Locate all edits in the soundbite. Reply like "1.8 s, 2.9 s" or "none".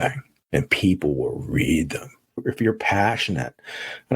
2.4 s